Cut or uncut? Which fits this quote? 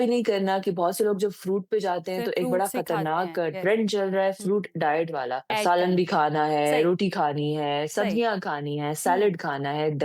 cut